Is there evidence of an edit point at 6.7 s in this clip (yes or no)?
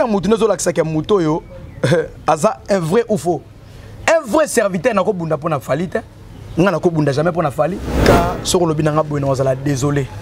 no